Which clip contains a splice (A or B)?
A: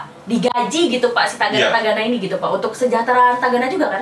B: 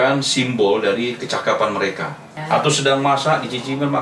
B